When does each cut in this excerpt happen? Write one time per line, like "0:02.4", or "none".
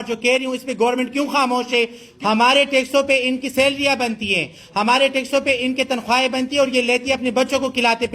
0:02.0